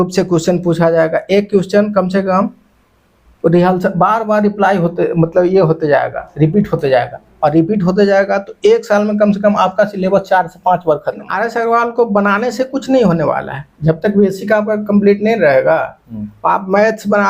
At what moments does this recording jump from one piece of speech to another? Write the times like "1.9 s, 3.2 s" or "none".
11.3 s